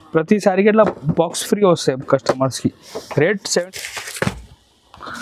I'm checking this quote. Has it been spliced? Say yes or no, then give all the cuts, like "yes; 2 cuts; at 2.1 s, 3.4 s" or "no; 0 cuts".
yes; 1 cut; at 3.6 s